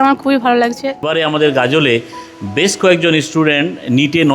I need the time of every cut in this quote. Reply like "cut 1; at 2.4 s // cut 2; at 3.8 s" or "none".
cut 1; at 1.1 s